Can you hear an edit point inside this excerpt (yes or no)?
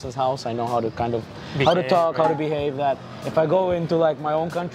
no